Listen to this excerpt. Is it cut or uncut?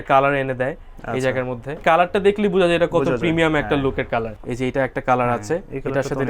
cut